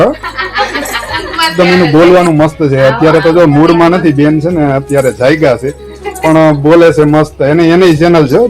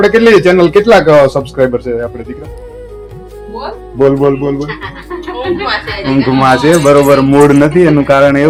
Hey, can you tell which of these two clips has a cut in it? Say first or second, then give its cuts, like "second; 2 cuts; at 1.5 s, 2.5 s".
first; 1 cut; at 1.5 s